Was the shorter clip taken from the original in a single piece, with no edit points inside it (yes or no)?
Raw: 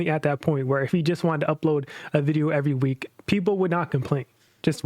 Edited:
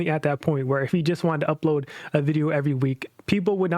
yes